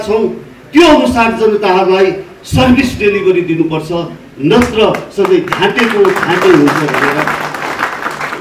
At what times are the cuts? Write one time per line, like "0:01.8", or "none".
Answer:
none